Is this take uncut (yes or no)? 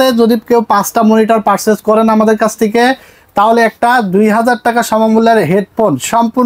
yes